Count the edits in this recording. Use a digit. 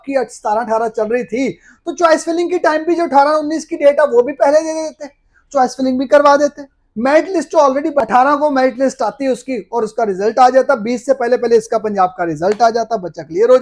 1